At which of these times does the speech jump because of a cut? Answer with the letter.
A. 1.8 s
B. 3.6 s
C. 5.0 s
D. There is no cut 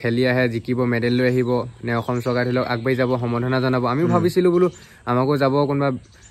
D